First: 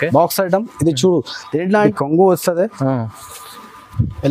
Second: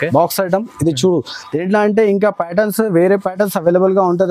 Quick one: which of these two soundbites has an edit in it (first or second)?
first